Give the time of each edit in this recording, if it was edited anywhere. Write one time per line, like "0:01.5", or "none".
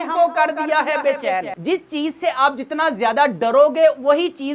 0:01.5